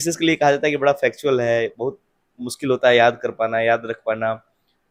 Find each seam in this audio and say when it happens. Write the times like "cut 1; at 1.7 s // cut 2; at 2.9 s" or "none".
none